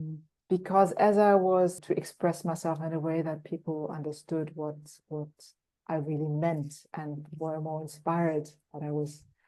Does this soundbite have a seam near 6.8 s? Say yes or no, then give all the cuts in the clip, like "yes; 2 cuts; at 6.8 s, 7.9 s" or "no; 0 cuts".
no; 1 cut; at 1.8 s